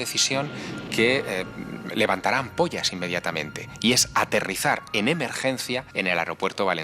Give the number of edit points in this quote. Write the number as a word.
one